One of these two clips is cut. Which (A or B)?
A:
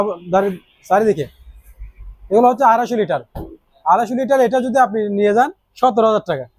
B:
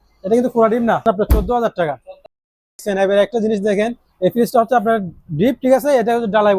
B